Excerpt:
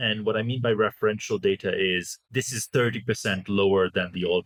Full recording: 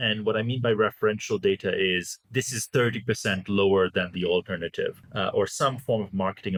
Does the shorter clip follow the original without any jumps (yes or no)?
yes